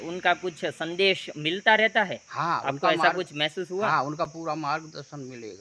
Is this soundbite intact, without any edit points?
yes; 0 cuts

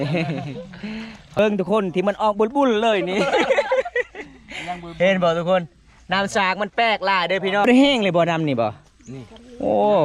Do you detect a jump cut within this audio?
yes; 2 cuts; at 1.4 s, 7.7 s

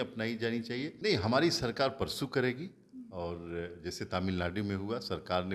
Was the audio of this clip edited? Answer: yes; 1 cut; at 0.9 s

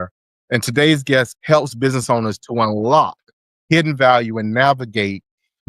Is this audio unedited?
no; 1 cut; at 1.3 s

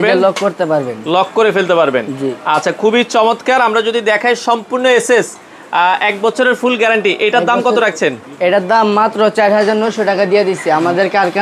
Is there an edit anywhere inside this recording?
no; 0 cuts

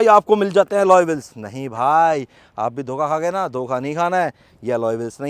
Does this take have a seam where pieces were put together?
no; 0 cuts

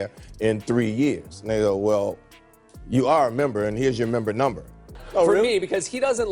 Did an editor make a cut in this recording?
yes; 1 cut; at 4.9 s

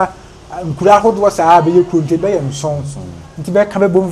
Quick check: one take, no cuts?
yes; 0 cuts

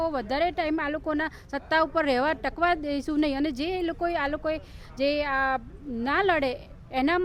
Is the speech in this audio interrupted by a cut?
no; 0 cuts

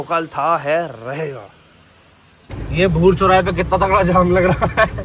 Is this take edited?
yes; 1 cut; at 2.5 s

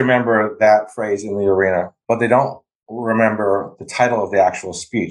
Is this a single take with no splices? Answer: yes; 0 cuts

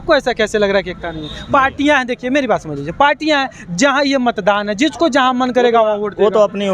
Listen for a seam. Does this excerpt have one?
no; 0 cuts

